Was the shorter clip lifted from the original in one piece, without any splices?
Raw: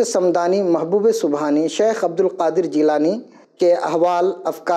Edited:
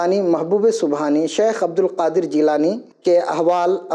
no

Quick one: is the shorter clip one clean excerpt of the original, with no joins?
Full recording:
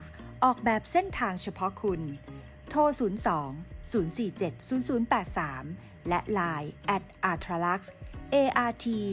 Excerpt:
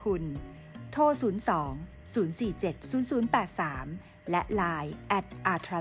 yes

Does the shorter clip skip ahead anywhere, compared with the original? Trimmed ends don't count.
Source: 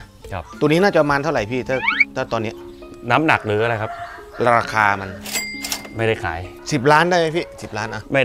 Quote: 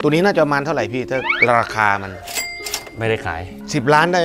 yes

